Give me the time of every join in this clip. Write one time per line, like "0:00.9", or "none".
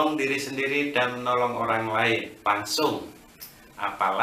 0:02.3